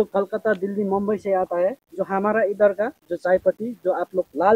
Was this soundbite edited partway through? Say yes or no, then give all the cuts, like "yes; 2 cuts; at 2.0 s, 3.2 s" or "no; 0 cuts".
yes; 2 cuts; at 1.9 s, 3.0 s